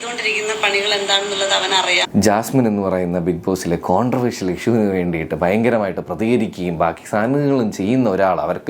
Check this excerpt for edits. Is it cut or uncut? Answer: cut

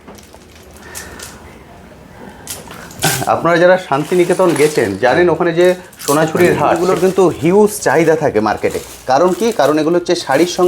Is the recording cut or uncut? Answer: cut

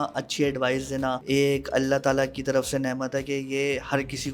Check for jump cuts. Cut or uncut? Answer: cut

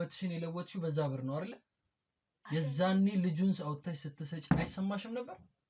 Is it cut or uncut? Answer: uncut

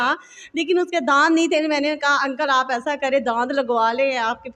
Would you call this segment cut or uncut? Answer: uncut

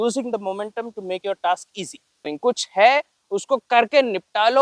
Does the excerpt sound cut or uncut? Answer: cut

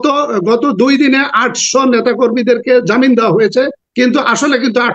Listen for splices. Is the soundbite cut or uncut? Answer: cut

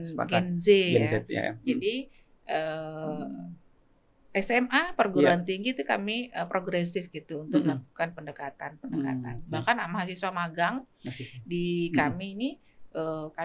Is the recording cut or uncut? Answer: uncut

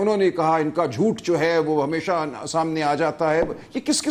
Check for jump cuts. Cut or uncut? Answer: uncut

